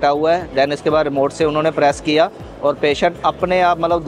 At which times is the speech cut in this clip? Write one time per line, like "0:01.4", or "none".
none